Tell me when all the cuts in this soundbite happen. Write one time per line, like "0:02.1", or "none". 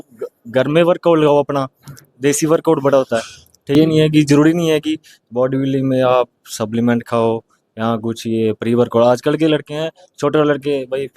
0:03.7